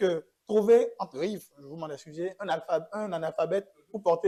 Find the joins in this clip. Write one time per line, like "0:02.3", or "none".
none

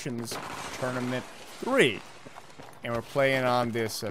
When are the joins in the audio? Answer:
none

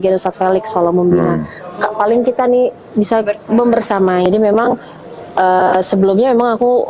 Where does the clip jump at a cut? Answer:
0:04.3

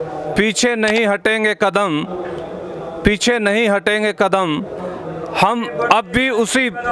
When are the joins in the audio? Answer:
none

